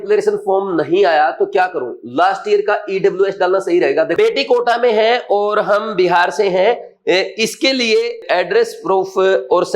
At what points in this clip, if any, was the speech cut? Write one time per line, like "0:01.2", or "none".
0:04.1
0:08.2